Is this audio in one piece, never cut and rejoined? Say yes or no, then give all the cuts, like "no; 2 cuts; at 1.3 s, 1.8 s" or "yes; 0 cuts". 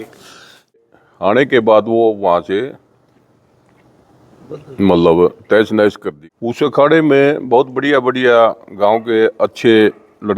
no; 2 cuts; at 0.8 s, 6.1 s